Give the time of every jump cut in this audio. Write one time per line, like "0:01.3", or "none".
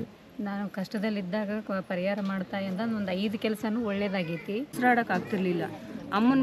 0:04.7